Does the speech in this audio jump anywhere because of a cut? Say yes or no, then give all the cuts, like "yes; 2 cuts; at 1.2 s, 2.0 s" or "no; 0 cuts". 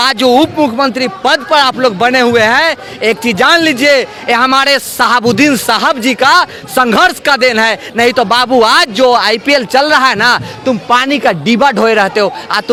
no; 0 cuts